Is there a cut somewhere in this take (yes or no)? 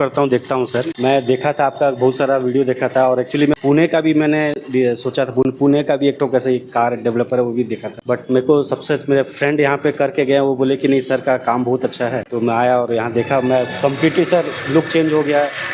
yes